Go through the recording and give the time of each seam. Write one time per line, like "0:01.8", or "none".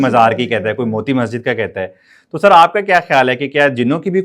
none